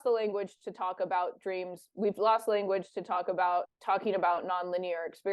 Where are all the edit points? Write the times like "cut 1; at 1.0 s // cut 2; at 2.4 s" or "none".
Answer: cut 1; at 3.4 s

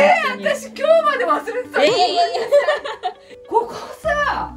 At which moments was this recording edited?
cut 1; at 3.2 s

